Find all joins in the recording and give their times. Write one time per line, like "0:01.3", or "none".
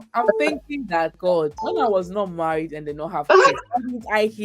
0:01.3